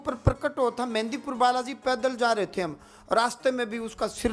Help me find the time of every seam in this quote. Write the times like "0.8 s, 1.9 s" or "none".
none